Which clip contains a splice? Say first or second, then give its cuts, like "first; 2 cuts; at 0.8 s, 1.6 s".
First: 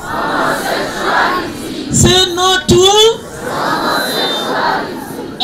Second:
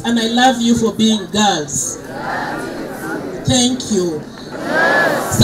second; 1 cut; at 4.5 s